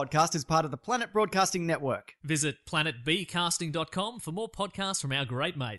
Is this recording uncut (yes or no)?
yes